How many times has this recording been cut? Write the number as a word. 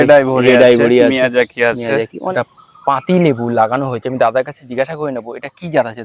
one